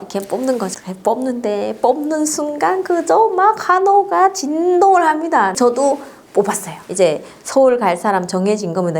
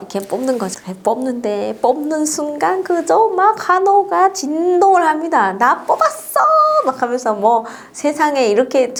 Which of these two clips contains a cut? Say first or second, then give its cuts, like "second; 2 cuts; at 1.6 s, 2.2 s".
first; 2 cuts; at 5.5 s, 6.8 s